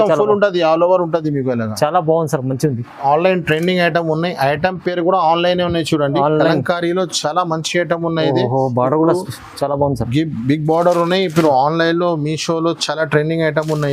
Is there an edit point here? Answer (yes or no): yes